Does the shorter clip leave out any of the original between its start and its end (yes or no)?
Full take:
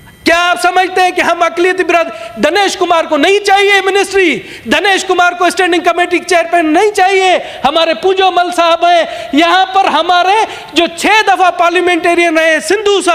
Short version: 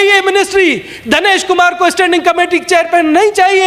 no